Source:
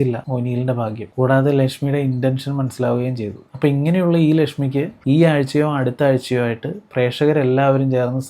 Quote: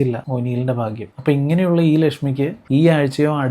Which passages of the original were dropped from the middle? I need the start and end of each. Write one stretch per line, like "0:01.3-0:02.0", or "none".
0:01.0-0:03.4

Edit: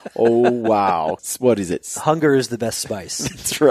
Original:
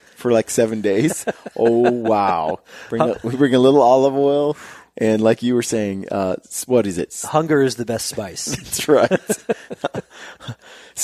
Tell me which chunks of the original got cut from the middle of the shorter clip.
0:02.7-0:06.5

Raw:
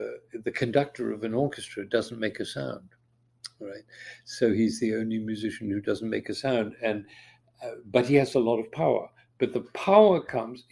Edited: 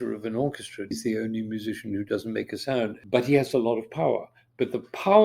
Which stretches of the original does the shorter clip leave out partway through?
0:01.9-0:04.7
0:06.7-0:07.8

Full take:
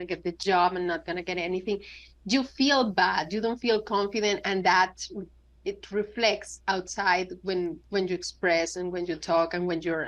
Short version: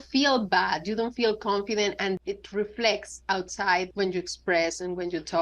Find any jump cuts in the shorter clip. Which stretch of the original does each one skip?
0:04.6-0:05.6
0:07.3-0:07.9

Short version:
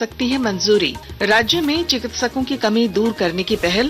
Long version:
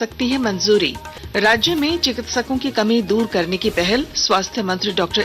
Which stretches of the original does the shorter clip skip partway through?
0:01.0-0:01.2

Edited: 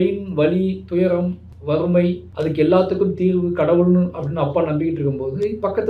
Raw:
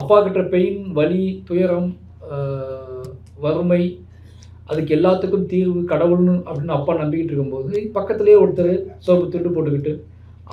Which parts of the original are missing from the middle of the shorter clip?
0:02.1-0:03.2
0:04.0-0:04.6

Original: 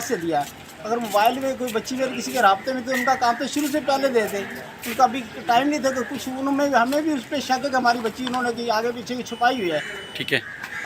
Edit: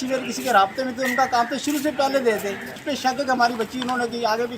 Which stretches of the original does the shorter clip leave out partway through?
0:04.7-0:07.3

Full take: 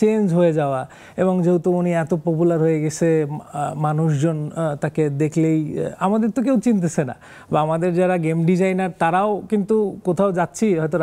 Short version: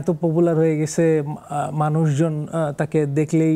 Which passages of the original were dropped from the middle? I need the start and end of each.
none

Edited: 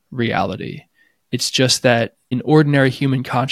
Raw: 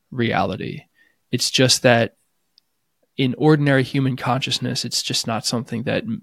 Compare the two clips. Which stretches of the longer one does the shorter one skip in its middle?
0:02.3-0:03.3

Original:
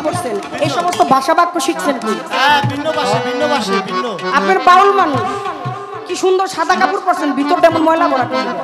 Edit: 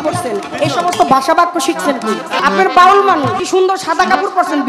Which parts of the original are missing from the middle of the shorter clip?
0:02.4-0:04.3
0:05.3-0:06.1

